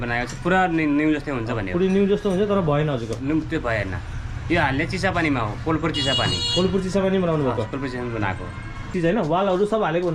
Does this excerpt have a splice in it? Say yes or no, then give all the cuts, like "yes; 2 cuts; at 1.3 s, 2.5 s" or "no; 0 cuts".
yes; 1 cut; at 8.9 s